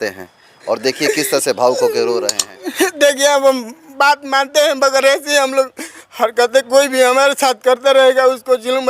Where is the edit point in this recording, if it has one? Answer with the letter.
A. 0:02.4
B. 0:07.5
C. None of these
A